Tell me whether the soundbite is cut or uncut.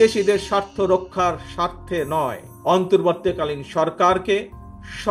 cut